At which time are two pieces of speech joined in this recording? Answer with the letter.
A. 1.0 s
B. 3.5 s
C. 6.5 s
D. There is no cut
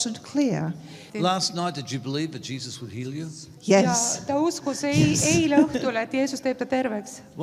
A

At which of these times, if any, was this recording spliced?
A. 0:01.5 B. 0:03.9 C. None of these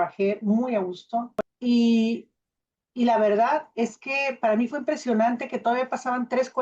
A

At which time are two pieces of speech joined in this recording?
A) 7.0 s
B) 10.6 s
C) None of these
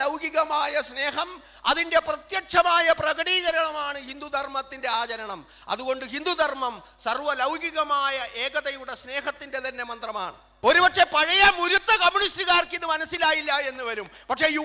B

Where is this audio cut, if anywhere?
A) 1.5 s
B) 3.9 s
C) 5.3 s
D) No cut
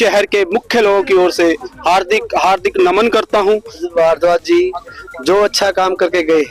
B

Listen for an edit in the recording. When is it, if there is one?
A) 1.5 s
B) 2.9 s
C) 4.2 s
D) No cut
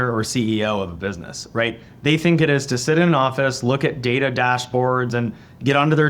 D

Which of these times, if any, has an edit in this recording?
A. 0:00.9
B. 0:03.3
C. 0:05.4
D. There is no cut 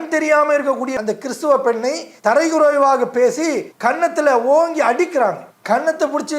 A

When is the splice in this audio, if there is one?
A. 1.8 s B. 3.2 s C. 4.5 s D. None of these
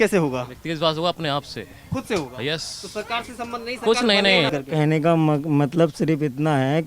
C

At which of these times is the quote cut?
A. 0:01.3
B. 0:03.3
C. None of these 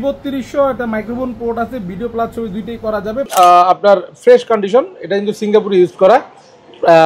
B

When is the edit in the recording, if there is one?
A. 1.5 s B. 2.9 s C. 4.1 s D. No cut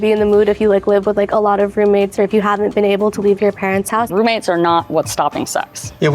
C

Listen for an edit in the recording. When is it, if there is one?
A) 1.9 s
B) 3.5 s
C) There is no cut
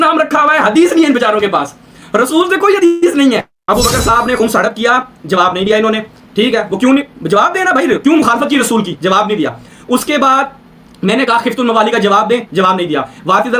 B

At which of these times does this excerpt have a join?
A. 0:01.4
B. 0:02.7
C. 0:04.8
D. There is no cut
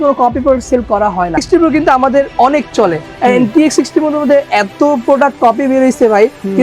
A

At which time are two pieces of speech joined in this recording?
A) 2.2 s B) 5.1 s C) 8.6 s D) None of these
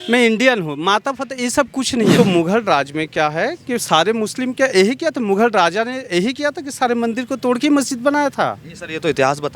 A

